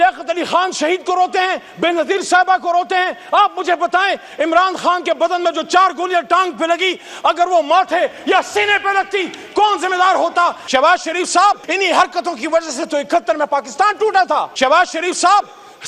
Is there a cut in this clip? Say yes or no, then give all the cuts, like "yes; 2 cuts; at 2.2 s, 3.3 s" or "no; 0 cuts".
yes; 3 cuts; at 10.6 s, 11.7 s, 14.5 s